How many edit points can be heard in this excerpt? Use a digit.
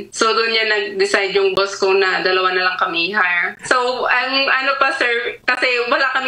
1